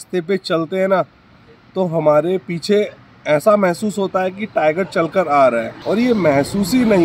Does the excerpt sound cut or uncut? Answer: uncut